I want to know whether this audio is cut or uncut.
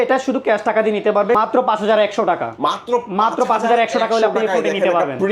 cut